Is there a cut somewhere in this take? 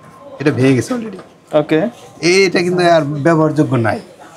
no; 0 cuts

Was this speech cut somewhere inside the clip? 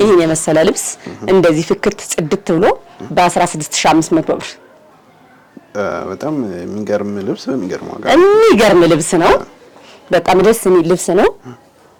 no; 0 cuts

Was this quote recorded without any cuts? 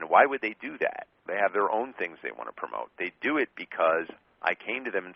yes; 0 cuts

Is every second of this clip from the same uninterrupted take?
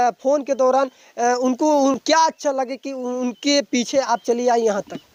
yes; 0 cuts

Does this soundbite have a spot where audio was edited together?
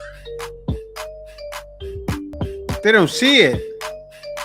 yes; 1 cut; at 2.3 s

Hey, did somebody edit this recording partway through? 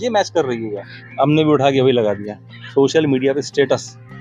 yes; 1 cut; at 2.6 s

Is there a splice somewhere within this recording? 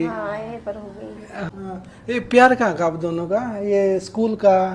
yes; 1 cut; at 1.5 s

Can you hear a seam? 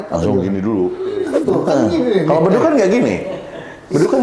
yes; 1 cut; at 1.2 s

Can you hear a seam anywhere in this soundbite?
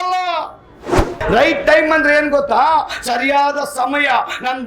yes; 1 cut; at 1.0 s

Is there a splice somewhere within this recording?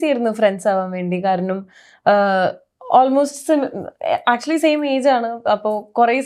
no; 0 cuts

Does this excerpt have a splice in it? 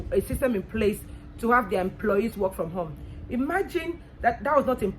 no; 0 cuts

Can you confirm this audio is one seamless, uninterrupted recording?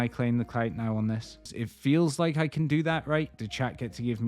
no; 2 cuts; at 1.6 s, 3.4 s

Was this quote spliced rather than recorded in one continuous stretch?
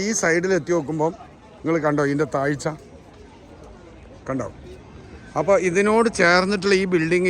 no; 0 cuts

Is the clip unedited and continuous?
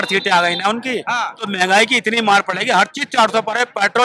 yes; 0 cuts

